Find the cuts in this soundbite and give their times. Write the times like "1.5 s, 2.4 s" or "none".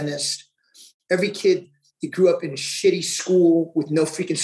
none